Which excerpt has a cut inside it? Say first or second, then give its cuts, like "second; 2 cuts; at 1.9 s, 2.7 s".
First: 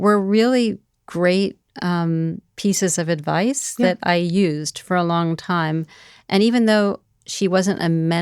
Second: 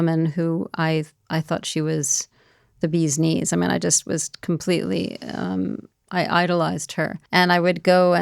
second; 1 cut; at 7.2 s